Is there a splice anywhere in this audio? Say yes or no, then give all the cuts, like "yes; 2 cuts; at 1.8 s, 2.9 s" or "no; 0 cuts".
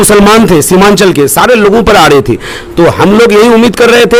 no; 0 cuts